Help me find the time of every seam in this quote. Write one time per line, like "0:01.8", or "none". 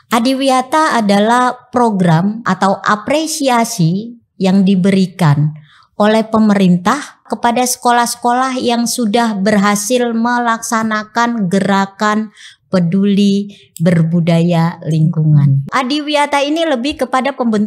0:02.5
0:07.3
0:15.7